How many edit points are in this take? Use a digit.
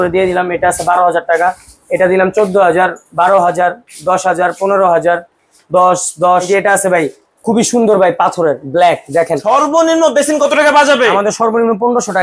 2